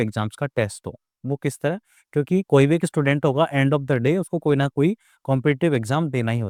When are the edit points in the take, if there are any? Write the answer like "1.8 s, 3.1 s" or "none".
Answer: none